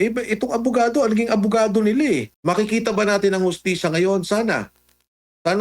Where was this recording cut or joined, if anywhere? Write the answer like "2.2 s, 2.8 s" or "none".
2.3 s